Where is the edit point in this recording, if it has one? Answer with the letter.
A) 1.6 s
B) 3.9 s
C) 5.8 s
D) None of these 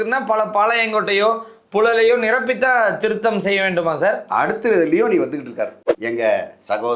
C